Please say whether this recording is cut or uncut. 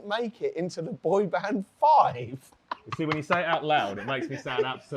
uncut